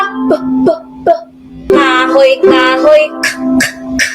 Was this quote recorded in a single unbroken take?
no; 1 cut; at 1.7 s

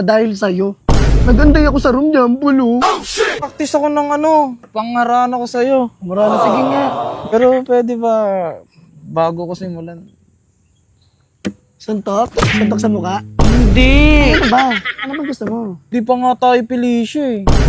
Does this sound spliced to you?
yes; 3 cuts; at 3.5 s, 7.2 s, 15.9 s

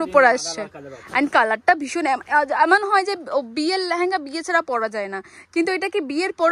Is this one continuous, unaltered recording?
yes; 0 cuts

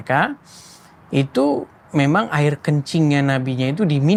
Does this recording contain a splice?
no; 0 cuts

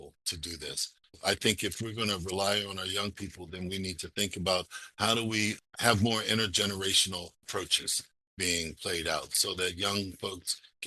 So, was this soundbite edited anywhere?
yes; 1 cut; at 1.2 s

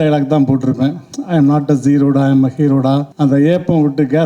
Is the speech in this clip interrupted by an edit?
yes; 1 cut; at 3.1 s

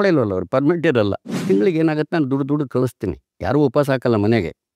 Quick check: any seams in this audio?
yes; 1 cut; at 1.3 s

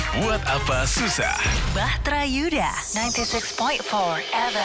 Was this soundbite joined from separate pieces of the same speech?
no; 0 cuts

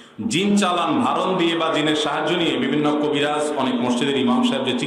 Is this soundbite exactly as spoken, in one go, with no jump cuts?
yes; 0 cuts

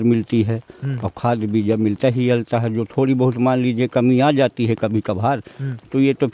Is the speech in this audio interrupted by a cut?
no; 0 cuts

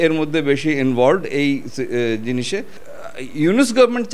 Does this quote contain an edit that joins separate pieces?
yes; 1 cut; at 2.8 s

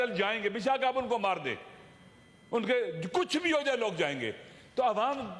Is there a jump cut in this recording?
no; 0 cuts

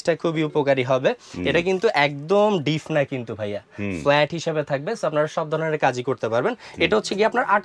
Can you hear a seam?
no; 0 cuts

